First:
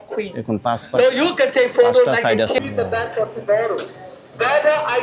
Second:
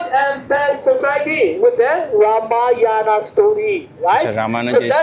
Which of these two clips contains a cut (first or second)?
first